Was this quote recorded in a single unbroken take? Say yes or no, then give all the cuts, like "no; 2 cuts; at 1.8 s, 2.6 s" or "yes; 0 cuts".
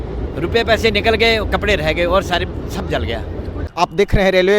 no; 1 cut; at 3.7 s